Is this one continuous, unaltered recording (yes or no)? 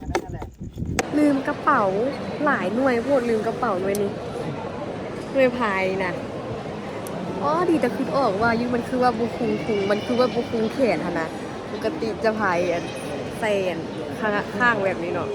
no